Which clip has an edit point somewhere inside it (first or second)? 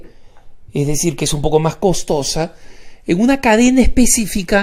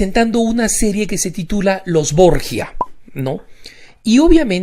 second